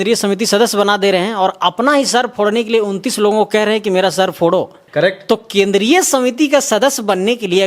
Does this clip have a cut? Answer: yes; 1 cut; at 4.8 s

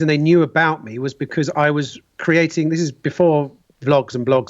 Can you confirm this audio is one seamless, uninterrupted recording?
yes; 0 cuts

